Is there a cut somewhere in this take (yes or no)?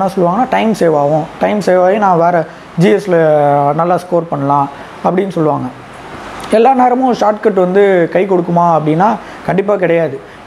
no